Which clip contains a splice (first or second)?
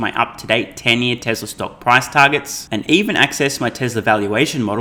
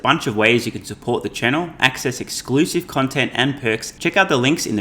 second